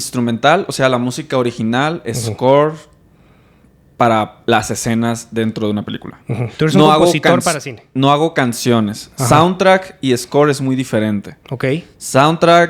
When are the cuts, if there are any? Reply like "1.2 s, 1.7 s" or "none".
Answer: none